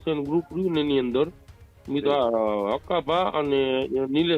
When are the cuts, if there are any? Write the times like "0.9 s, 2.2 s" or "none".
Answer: none